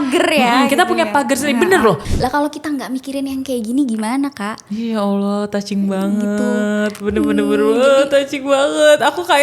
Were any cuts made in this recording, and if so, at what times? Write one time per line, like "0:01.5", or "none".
0:02.1